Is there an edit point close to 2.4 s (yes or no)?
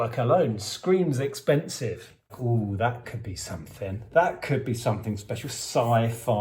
yes